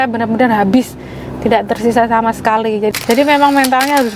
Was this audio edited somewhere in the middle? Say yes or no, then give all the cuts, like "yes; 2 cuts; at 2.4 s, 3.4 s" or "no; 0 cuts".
yes; 1 cut; at 2.9 s